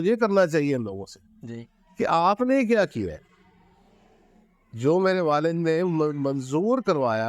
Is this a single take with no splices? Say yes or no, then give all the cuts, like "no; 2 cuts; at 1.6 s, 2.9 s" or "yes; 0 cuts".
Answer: yes; 0 cuts